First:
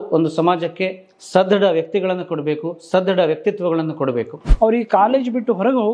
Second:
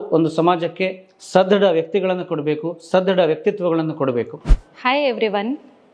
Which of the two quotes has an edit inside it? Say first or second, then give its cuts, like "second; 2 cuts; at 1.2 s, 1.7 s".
first; 1 cut; at 4.5 s